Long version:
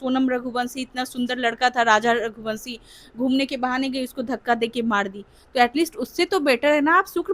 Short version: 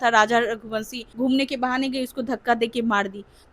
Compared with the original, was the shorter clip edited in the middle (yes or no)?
yes